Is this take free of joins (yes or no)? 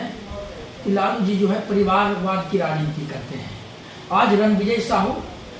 yes